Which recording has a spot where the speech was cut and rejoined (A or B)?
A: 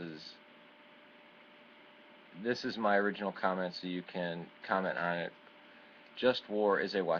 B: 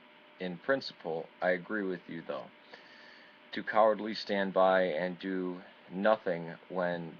B